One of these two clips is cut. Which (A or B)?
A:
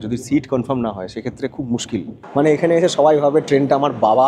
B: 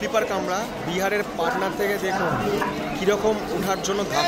A